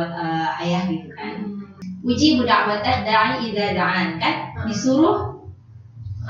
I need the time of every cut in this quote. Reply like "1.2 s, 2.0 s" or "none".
1.7 s

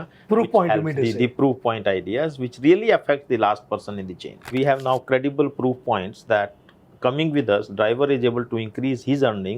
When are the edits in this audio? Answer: 4.5 s

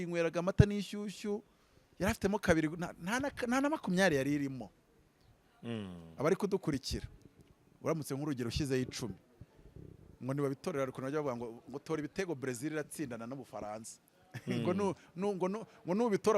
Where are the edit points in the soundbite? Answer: none

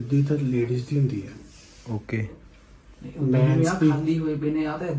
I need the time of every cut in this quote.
none

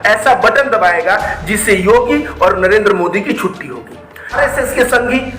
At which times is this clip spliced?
4.4 s

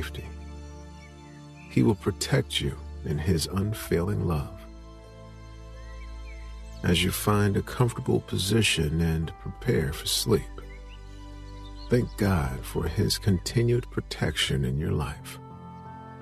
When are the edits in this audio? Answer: 15.2 s

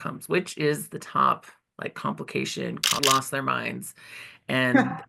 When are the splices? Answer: 3.0 s

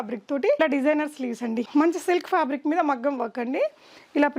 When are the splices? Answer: 1.6 s

